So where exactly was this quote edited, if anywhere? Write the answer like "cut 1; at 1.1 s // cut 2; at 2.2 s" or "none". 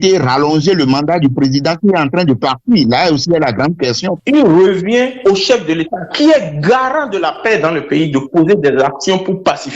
cut 1; at 4.1 s